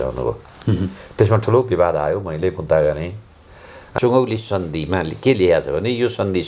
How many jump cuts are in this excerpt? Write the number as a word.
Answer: one